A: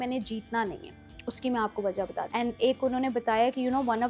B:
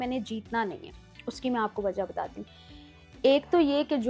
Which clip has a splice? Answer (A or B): A